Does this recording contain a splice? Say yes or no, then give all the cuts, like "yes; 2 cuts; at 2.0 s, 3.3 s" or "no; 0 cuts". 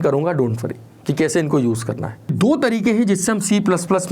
yes; 1 cut; at 2.3 s